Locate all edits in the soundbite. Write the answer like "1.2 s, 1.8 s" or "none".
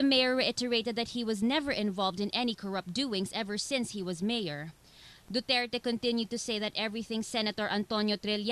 6.9 s